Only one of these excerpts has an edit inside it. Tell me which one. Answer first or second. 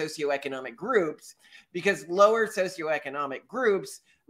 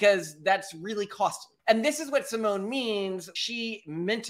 second